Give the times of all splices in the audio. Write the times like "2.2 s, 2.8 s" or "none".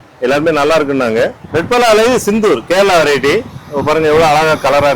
1.4 s